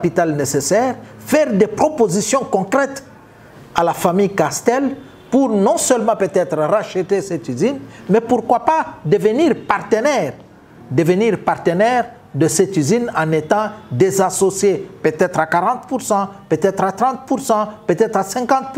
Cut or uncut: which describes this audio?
uncut